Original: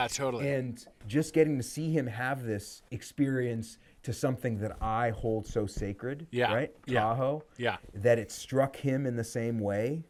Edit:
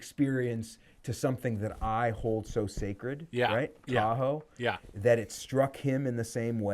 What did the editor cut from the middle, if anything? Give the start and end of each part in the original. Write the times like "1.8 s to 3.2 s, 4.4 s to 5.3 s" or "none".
none